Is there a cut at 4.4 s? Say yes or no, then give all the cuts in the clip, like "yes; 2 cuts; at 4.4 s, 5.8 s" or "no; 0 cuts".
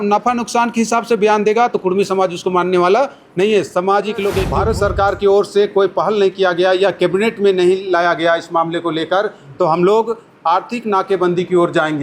yes; 1 cut; at 4.4 s